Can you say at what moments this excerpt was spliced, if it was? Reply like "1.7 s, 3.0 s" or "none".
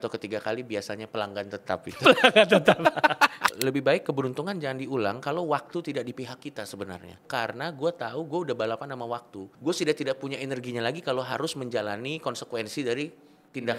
3.5 s, 7.3 s, 9.5 s